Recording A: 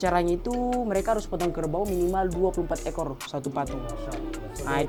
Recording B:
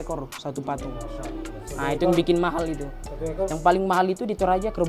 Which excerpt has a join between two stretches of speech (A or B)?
B